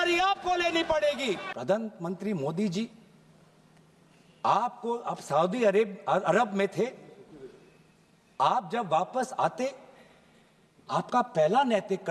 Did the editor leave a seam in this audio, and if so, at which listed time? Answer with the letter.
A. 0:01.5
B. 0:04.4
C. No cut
A